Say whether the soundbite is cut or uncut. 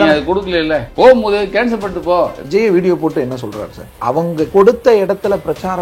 cut